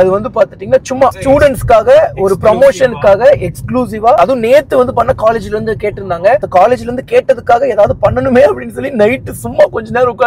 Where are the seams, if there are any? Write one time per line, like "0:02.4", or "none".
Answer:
0:01.2
0:04.2